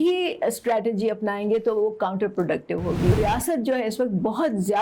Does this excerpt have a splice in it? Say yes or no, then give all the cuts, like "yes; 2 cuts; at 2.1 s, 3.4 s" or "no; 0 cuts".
yes; 1 cut; at 3.1 s